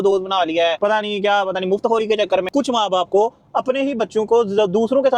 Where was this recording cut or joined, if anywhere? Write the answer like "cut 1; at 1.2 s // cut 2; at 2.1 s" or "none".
cut 1; at 2.4 s